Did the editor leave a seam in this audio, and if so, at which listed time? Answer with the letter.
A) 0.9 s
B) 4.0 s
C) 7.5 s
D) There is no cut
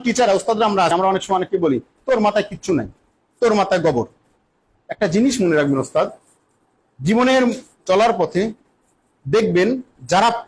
A